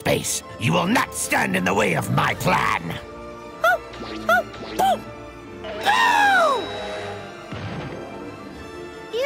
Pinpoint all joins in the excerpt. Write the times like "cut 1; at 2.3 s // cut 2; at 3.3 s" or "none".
none

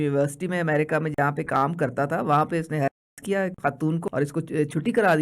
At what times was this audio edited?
cut 1; at 4.1 s

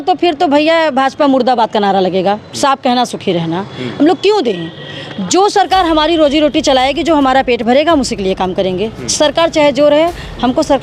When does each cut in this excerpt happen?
none

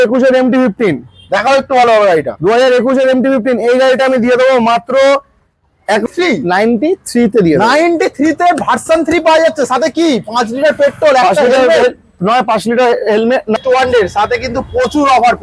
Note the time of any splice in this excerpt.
cut 1; at 6.1 s // cut 2; at 13.6 s

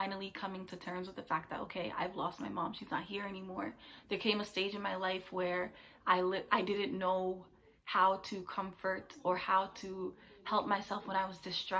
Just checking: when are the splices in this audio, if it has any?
none

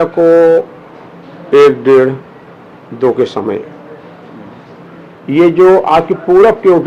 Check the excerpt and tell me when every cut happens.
none

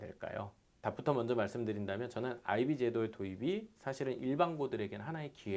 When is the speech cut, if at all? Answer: none

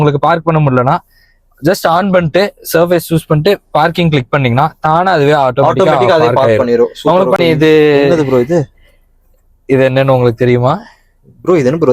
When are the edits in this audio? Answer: cut 1; at 7.4 s

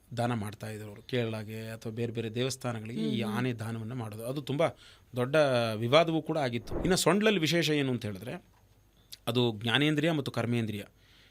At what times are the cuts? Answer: cut 1; at 6.7 s

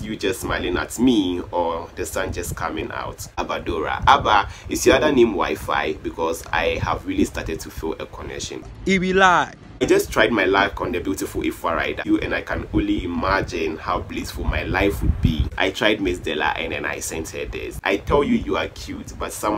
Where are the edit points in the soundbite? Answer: cut 1; at 3.4 s // cut 2; at 9.8 s // cut 3; at 12.0 s // cut 4; at 15.5 s

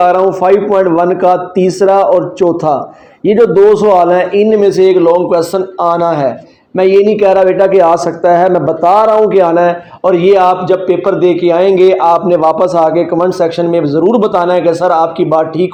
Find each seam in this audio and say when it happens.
none

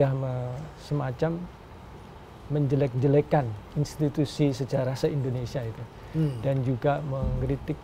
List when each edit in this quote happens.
none

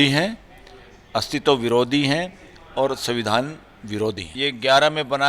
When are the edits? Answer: cut 1; at 4.3 s

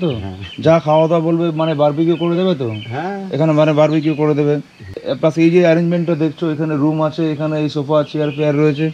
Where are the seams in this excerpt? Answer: cut 1; at 5.1 s

